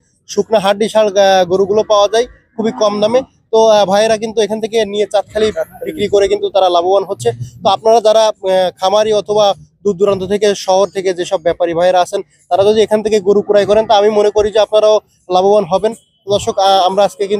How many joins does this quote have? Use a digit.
0